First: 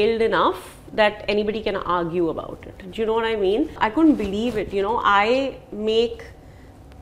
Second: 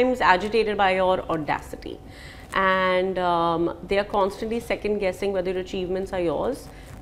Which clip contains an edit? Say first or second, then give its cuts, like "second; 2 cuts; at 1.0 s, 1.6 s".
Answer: first; 1 cut; at 3.7 s